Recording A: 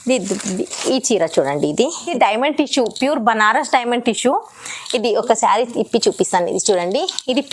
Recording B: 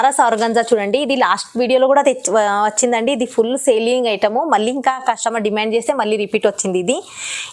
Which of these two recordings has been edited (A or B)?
A